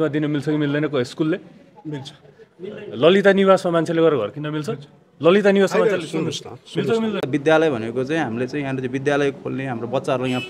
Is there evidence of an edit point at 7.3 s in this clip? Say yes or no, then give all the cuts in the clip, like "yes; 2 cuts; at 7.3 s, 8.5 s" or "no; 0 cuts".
yes; 1 cut; at 7.3 s